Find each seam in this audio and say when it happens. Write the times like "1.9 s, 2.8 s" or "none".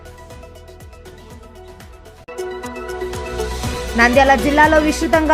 2.2 s, 3.9 s